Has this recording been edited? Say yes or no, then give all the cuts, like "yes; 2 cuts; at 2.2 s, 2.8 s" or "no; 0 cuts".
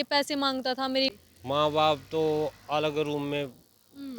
yes; 1 cut; at 1.1 s